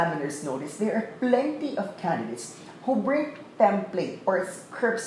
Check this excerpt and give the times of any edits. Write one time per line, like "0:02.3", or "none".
none